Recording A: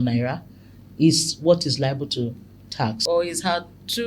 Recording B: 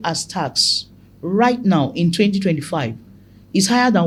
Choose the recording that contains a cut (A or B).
A